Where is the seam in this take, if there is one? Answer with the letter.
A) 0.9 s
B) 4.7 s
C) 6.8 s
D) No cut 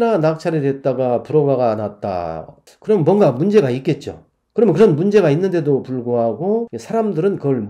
C